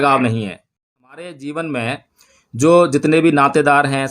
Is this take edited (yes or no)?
yes